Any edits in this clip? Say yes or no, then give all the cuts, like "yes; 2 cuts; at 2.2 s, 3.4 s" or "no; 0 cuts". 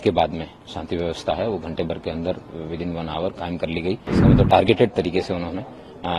yes; 1 cut; at 4.1 s